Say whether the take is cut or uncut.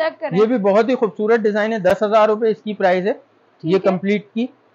uncut